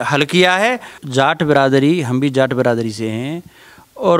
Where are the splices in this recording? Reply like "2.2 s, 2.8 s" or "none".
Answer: 1.0 s